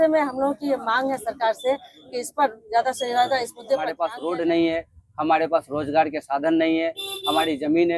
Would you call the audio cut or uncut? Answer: cut